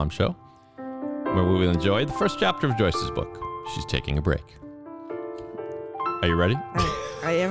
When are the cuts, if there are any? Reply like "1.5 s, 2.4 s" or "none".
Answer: none